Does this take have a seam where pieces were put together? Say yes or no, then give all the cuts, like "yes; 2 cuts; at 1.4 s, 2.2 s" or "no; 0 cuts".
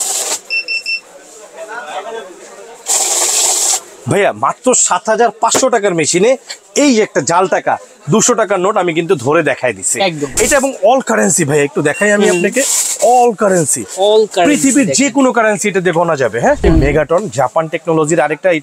yes; 2 cuts; at 10.3 s, 16.6 s